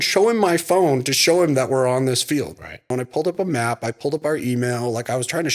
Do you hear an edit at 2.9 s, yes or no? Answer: yes